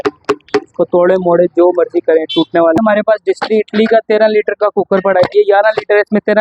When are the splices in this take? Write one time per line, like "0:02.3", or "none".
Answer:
0:02.8